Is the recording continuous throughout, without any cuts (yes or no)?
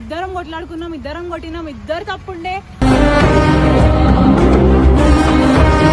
yes